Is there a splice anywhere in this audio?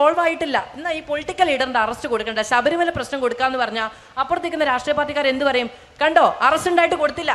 no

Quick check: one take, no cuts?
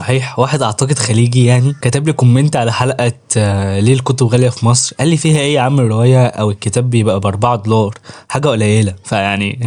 yes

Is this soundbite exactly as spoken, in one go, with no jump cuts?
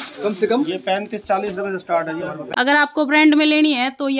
no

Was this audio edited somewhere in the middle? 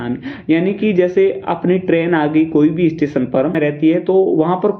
yes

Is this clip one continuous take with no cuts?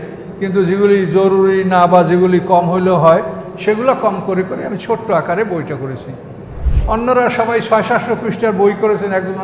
yes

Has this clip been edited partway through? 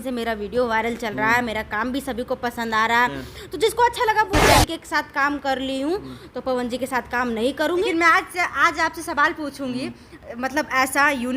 yes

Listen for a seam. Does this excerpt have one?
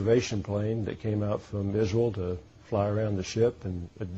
yes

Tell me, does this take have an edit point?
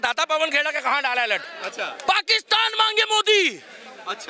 yes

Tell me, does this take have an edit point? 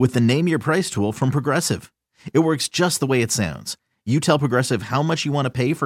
no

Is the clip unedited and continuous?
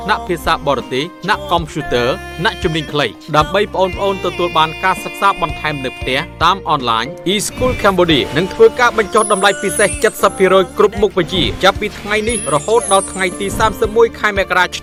yes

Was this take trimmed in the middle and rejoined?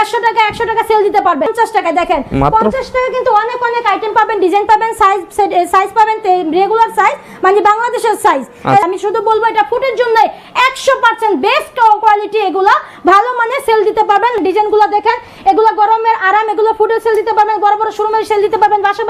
yes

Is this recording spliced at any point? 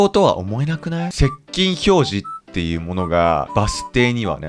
yes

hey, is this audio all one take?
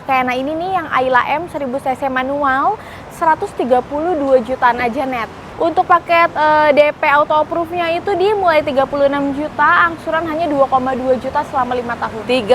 no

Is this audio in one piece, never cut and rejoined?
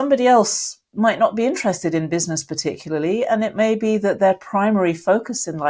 yes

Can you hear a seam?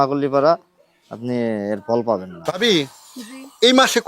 yes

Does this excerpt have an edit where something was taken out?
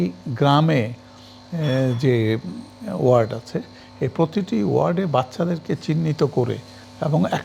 no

